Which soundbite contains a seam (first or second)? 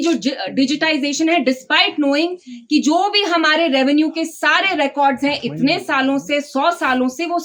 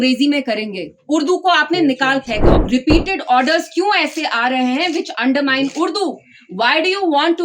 second